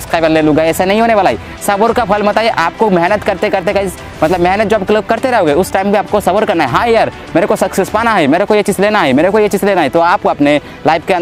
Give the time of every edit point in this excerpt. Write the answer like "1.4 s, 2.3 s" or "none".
none